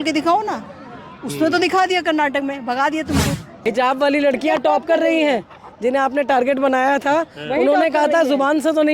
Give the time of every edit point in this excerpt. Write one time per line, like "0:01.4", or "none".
0:03.5